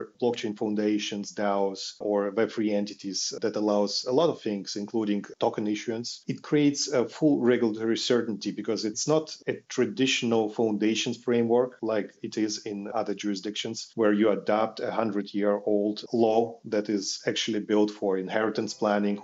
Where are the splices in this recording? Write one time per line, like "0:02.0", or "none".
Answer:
0:05.3
0:06.2
0:08.9